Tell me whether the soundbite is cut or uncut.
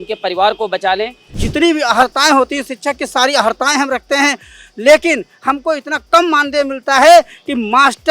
cut